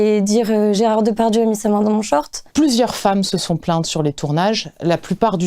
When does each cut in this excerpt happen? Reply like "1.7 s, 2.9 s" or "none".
2.4 s